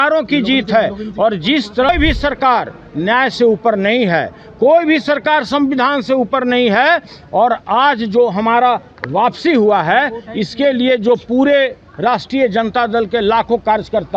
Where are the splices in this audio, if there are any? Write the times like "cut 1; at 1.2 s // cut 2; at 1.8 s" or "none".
cut 1; at 1.9 s

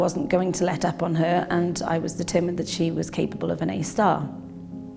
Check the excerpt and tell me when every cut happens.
none

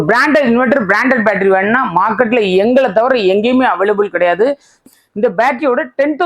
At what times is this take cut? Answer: cut 1; at 4.8 s

